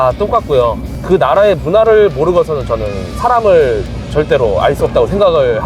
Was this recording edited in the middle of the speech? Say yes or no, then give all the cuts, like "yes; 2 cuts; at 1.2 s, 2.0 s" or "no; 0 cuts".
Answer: yes; 1 cut; at 0.9 s